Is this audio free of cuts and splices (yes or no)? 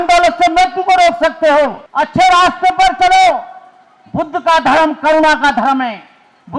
no